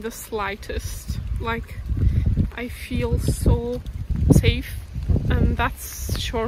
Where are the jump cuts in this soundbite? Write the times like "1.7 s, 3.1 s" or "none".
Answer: 4.1 s, 4.9 s